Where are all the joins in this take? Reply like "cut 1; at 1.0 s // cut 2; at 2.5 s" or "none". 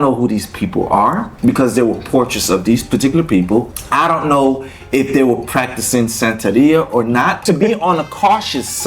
cut 1; at 1.3 s // cut 2; at 3.8 s // cut 3; at 7.4 s